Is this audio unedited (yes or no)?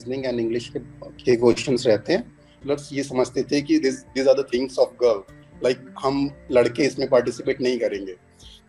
no